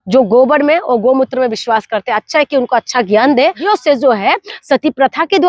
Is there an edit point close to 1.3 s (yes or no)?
no